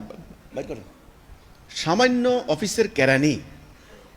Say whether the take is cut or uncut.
uncut